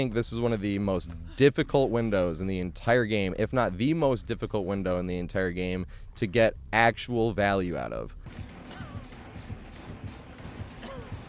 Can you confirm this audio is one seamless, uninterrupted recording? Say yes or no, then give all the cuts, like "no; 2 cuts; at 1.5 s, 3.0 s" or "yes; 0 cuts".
no; 1 cut; at 8.2 s